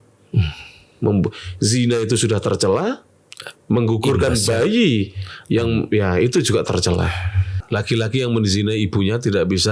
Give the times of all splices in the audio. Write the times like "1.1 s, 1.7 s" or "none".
7.5 s